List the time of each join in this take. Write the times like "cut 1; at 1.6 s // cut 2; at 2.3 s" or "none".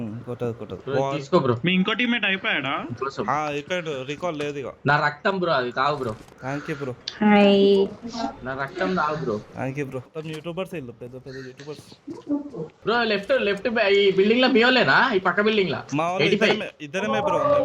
none

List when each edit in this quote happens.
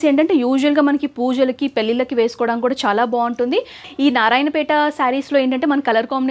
cut 1; at 3.8 s

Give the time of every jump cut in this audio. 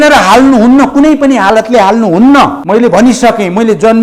cut 1; at 2.6 s

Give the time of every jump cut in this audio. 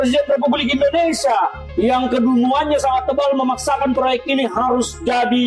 none

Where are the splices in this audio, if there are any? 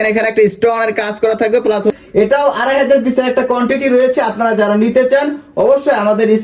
cut 1; at 1.9 s

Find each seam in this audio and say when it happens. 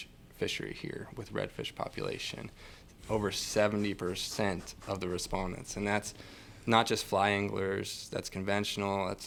none

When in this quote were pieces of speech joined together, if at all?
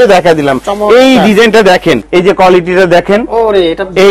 cut 1; at 2.0 s

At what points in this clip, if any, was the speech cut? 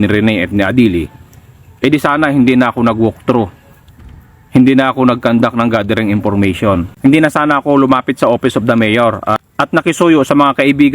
none

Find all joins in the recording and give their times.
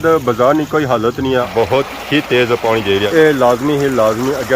cut 1; at 1.5 s

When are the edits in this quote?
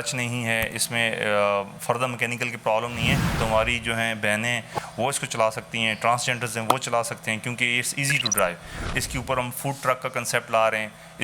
cut 1; at 3.3 s // cut 2; at 8.8 s

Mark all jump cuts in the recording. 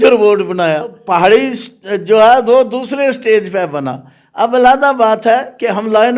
cut 1; at 1.0 s

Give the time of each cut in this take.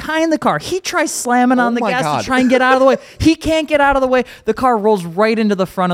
none

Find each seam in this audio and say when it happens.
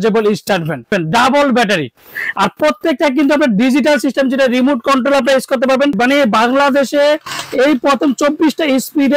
cut 1; at 0.9 s // cut 2; at 6.0 s

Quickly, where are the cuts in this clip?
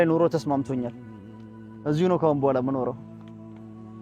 cut 1; at 3.0 s

